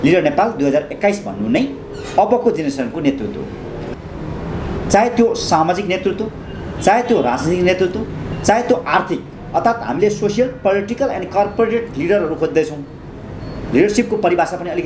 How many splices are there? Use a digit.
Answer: 1